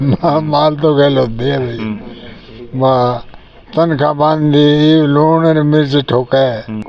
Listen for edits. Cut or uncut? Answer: uncut